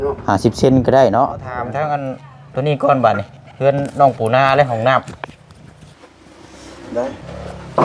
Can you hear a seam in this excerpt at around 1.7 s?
yes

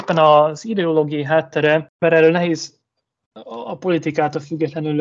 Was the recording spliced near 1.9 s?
yes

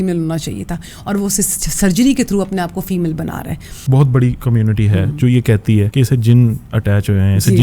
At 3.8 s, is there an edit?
yes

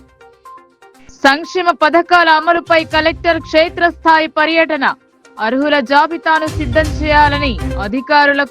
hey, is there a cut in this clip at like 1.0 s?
yes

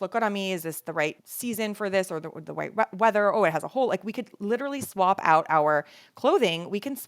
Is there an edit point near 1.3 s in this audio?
yes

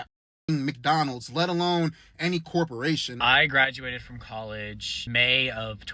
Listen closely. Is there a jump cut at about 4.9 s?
yes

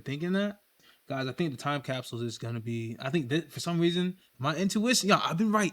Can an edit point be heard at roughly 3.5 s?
no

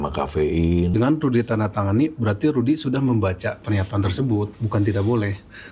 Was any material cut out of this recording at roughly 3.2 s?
no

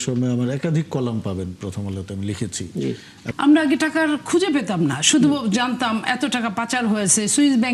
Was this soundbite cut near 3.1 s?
yes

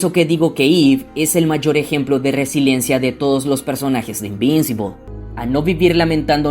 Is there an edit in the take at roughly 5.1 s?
yes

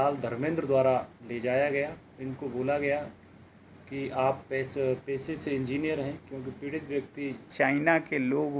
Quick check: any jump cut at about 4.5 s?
no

